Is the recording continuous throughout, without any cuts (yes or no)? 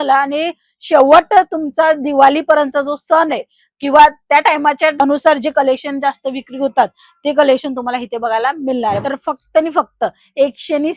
no